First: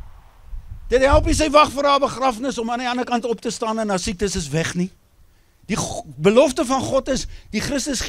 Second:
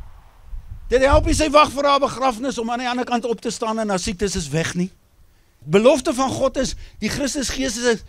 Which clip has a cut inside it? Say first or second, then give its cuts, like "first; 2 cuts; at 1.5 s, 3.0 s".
second; 1 cut; at 5.5 s